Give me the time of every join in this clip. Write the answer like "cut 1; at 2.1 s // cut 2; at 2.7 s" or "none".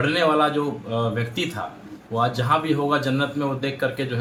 none